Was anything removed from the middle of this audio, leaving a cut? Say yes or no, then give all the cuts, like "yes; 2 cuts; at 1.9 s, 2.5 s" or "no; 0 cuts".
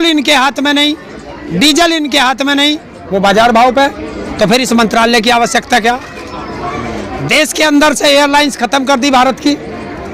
no; 0 cuts